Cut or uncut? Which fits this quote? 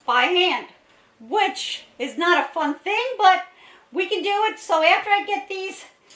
uncut